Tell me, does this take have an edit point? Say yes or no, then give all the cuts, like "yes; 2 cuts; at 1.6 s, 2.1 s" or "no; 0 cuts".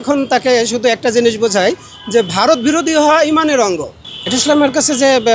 no; 0 cuts